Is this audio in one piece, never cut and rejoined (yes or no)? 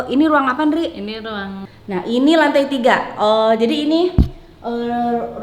no